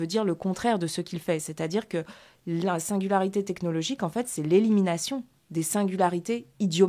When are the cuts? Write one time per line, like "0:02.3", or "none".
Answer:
none